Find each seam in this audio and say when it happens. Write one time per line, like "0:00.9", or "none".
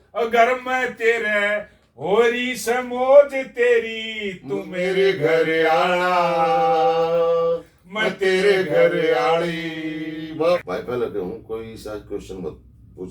0:10.6